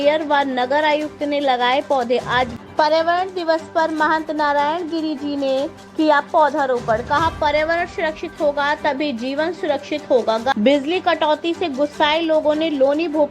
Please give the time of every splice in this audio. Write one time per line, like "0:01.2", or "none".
0:02.5
0:10.5